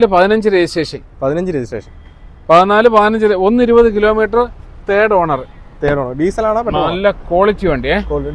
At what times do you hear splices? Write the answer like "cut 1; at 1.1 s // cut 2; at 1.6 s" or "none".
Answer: none